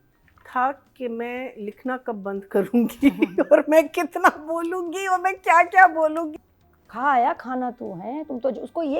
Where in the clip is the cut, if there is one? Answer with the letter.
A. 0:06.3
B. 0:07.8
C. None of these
A